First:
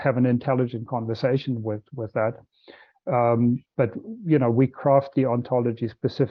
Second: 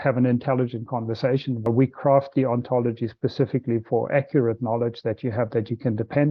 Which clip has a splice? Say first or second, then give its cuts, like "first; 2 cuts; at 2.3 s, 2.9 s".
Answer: second; 1 cut; at 1.7 s